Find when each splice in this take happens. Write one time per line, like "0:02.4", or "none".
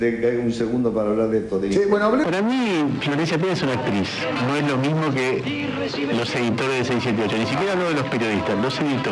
0:02.3
0:04.4